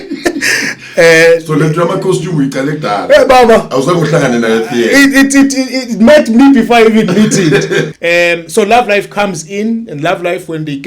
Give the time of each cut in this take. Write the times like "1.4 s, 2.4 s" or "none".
7.9 s